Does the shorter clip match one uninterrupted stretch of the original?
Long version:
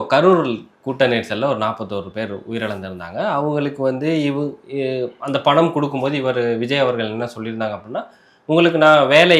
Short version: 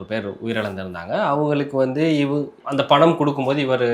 no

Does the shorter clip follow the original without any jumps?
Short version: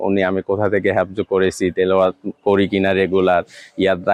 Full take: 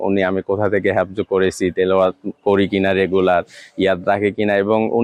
yes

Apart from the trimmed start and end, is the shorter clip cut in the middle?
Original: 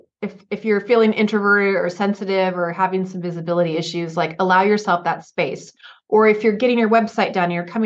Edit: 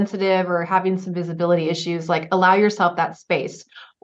no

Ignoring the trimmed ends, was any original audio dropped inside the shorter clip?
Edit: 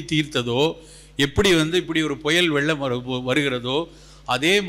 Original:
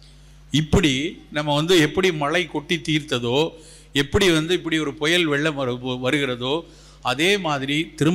no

